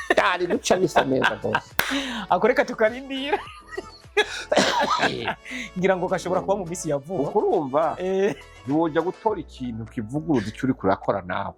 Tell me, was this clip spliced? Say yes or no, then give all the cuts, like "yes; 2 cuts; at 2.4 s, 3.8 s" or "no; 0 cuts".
no; 0 cuts